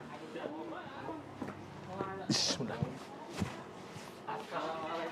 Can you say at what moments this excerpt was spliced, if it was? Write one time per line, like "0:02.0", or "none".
0:01.1
0:03.0